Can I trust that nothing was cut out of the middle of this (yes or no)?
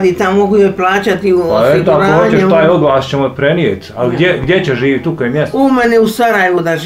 yes